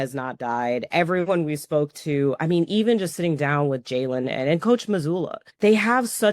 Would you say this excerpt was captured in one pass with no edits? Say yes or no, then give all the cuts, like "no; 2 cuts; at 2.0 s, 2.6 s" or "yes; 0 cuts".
no; 1 cut; at 5.4 s